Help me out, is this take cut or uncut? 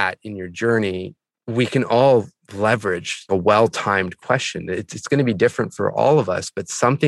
uncut